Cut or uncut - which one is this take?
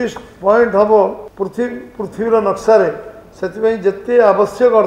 cut